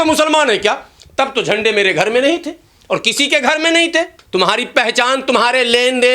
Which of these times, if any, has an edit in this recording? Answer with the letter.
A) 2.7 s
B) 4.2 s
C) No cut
B